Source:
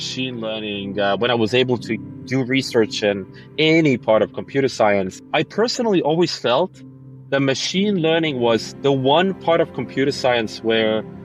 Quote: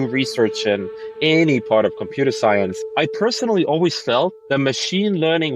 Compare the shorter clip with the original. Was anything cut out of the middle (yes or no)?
yes